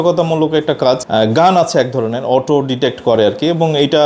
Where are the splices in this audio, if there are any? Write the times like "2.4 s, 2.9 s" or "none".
1.0 s